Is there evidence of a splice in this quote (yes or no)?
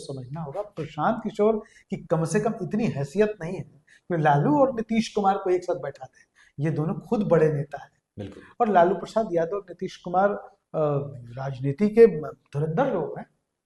no